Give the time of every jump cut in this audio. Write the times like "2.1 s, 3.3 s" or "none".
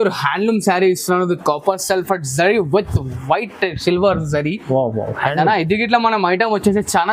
none